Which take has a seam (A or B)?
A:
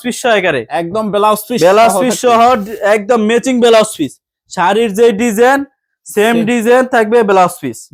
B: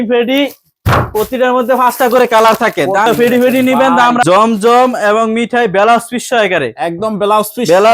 B